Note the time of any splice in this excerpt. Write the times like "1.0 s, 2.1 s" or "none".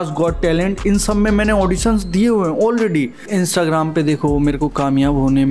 3.3 s